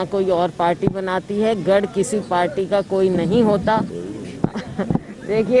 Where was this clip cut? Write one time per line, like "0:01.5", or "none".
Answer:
0:04.0